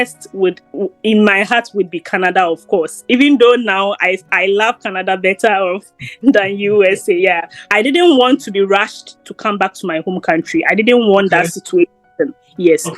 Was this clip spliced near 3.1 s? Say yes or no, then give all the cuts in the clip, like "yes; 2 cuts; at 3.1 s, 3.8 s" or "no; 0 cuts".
no; 1 cut; at 7.5 s